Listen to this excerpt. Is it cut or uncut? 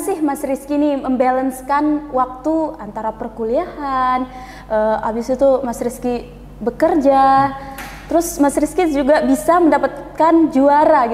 uncut